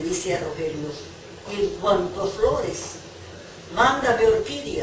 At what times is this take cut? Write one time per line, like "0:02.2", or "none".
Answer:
none